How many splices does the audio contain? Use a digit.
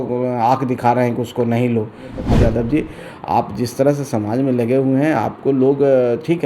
1